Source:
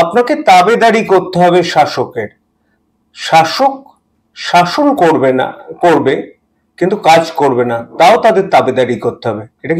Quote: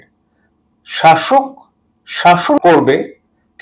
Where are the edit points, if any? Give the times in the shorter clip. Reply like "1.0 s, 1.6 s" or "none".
2.6 s